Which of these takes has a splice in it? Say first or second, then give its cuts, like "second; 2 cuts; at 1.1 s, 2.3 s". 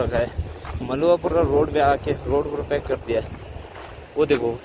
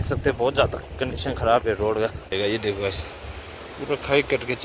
second; 1 cut; at 2.3 s